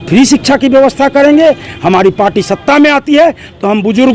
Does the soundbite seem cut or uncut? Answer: uncut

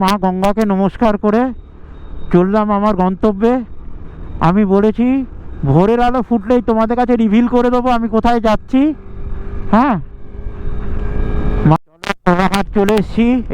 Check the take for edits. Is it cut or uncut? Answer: cut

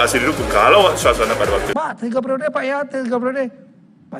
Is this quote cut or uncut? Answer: cut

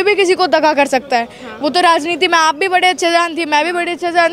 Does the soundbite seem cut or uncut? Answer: uncut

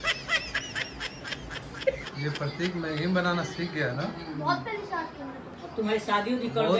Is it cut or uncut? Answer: cut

